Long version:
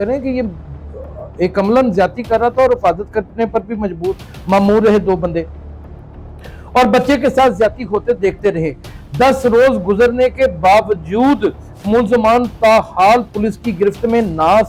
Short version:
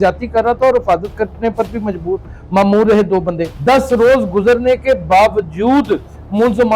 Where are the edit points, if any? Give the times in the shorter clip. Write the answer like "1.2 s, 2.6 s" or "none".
3.5 s